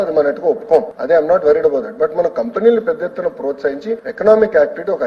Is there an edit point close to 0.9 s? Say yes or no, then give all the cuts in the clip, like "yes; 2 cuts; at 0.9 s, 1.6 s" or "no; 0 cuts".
yes; 2 cuts; at 0.9 s, 4.1 s